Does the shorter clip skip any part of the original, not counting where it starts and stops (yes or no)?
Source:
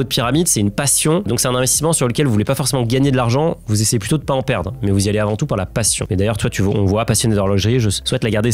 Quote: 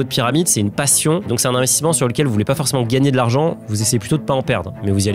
no